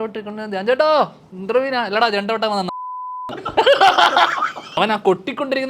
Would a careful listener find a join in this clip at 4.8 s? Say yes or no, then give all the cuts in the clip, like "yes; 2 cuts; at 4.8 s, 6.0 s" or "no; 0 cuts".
yes; 1 cut; at 4.8 s